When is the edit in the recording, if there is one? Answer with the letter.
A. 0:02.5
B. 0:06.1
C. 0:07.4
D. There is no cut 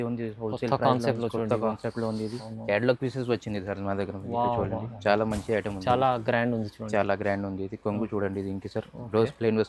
A